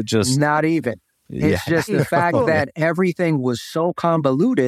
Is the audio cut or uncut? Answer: uncut